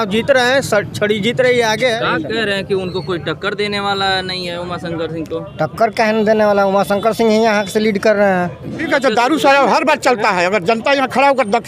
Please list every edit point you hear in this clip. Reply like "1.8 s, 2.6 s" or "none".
2.0 s, 8.9 s